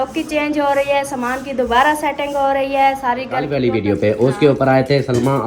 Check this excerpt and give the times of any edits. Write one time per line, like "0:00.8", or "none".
0:03.5